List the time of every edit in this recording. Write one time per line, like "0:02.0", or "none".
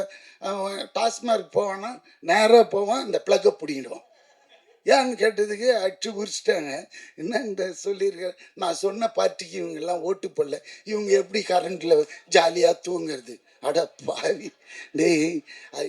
none